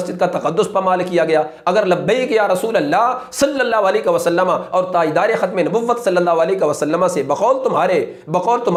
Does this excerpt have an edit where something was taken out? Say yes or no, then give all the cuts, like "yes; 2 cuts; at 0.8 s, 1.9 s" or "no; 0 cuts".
no; 0 cuts